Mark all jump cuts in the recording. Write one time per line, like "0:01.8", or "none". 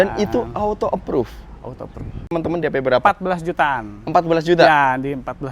0:02.3